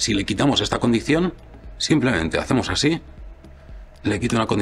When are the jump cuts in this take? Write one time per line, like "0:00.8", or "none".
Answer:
none

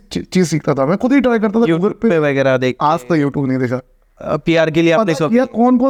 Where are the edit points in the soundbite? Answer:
none

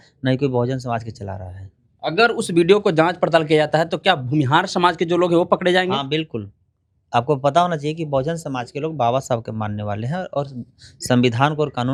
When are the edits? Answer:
none

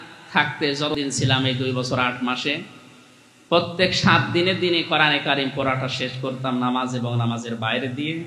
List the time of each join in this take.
0:00.9

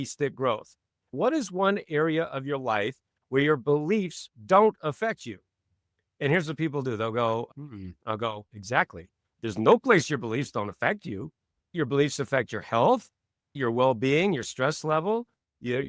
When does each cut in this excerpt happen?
0:01.1

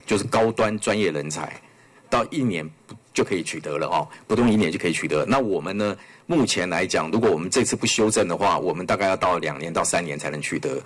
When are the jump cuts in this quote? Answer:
none

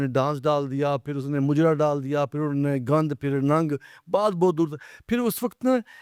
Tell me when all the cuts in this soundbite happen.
none

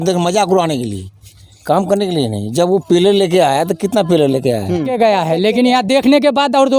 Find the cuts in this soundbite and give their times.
0:04.9

